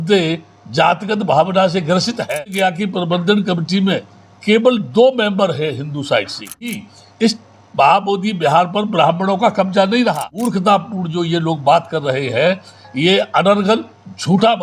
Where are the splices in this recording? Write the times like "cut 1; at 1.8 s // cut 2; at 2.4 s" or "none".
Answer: cut 1; at 2.3 s // cut 2; at 6.9 s // cut 3; at 10.5 s